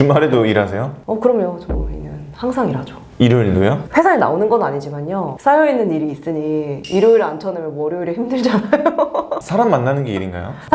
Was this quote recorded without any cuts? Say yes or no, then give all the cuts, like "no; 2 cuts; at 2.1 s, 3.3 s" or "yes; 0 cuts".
yes; 0 cuts